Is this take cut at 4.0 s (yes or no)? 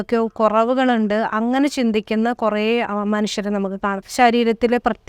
yes